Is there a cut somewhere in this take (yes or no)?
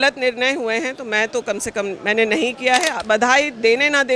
yes